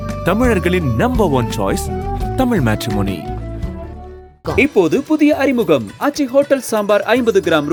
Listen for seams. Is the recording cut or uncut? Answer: uncut